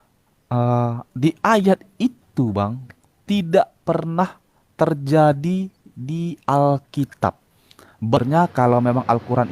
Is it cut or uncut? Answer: cut